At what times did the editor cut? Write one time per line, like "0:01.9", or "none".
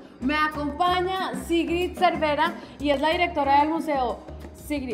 none